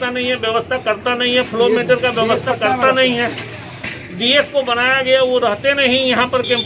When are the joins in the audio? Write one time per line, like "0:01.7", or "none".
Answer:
none